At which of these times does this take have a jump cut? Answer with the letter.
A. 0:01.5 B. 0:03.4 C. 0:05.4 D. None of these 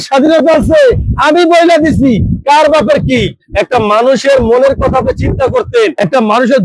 B